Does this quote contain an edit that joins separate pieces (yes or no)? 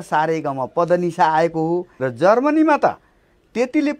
yes